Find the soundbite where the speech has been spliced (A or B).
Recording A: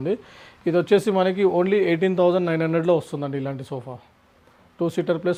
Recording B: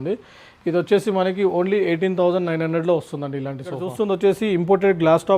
B